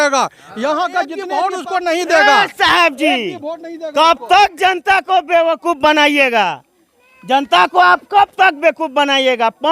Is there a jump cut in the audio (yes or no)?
yes